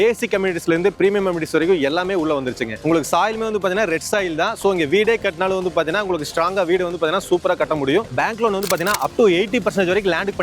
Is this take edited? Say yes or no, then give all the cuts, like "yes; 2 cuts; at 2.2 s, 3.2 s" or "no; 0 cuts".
yes; 2 cuts; at 2.8 s, 8.0 s